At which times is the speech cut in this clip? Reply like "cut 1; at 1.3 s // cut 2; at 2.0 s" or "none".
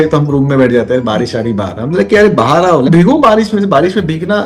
cut 1; at 2.9 s